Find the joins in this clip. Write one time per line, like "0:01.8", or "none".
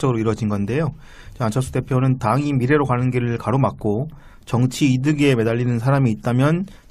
0:03.6